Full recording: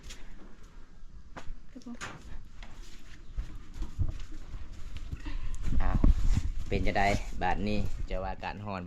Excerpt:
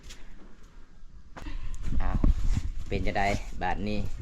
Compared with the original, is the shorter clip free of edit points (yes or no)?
no